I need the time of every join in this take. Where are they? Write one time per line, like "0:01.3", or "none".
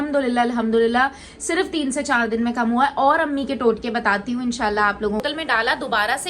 0:05.2